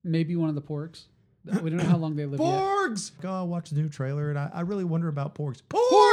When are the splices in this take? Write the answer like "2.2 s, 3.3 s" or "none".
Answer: 3.2 s